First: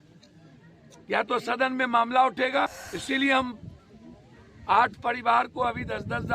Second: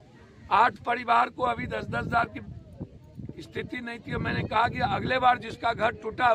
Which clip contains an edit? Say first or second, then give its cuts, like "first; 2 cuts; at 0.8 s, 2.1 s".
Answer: first; 1 cut; at 2.8 s